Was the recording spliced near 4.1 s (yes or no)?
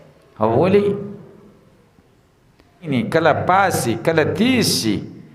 no